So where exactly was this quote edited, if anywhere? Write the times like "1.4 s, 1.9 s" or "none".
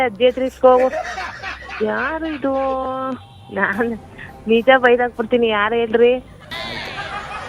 none

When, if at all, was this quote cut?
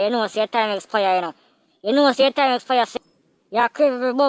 2.9 s

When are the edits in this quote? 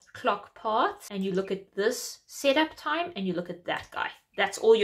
1.0 s

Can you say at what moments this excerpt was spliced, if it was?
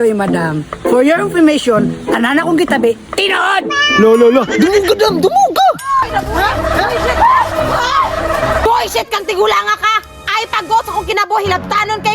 6.0 s, 8.6 s

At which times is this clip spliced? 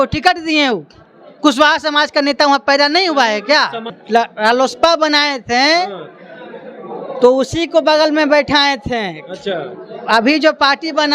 3.9 s

